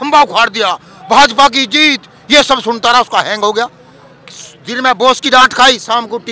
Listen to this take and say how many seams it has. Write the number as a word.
zero